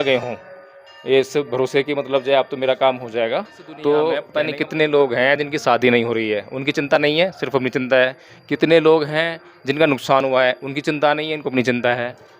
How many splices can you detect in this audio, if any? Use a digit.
1